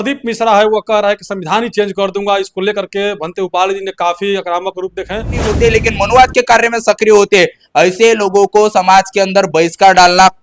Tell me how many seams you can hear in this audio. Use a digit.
1